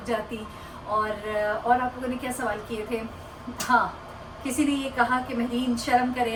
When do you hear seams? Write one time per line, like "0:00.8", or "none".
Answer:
none